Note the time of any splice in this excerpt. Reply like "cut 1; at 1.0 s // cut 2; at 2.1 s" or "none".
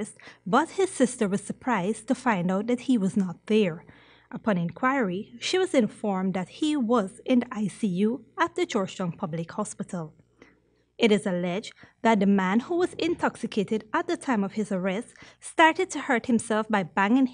none